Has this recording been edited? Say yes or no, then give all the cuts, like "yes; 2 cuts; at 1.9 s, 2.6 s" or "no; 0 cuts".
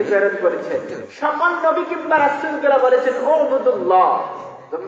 yes; 1 cut; at 1.0 s